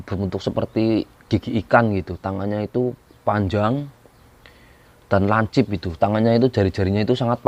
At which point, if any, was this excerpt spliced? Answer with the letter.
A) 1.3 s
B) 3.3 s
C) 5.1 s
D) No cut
D